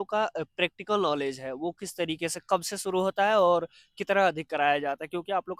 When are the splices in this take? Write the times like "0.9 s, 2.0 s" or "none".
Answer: none